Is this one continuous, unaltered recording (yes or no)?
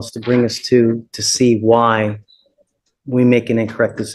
yes